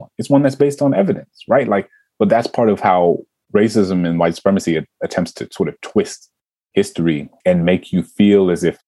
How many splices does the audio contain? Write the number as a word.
one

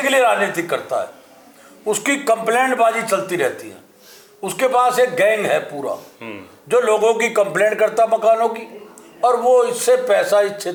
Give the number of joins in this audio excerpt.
zero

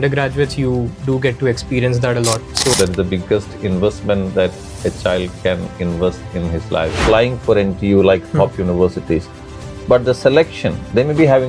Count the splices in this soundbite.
two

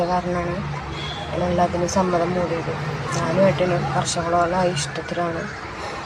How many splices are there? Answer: zero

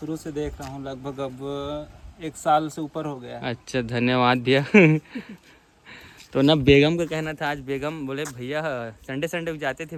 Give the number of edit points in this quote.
zero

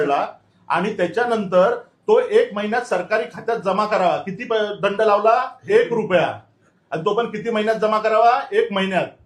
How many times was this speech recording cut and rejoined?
zero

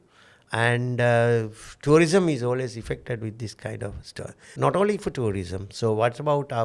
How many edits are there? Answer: one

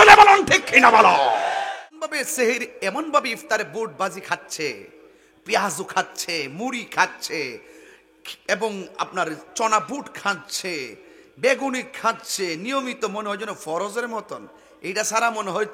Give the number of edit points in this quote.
one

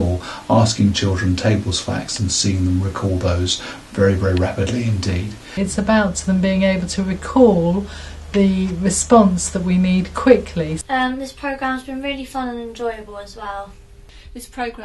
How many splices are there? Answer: three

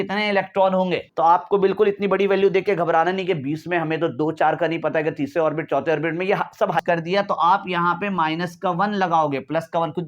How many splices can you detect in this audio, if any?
two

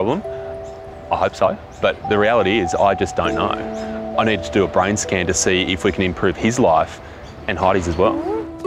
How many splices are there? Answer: zero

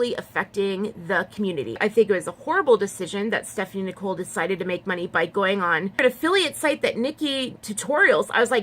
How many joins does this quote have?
two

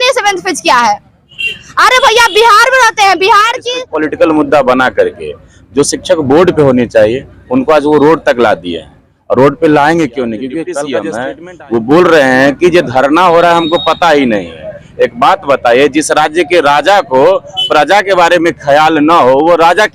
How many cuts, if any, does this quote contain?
two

